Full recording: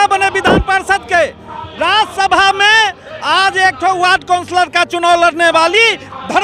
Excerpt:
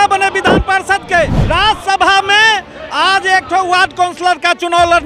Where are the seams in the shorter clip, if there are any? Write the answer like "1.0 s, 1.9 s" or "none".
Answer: 1.4 s